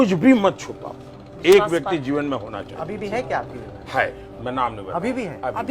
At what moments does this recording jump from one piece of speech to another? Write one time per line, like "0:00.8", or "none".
none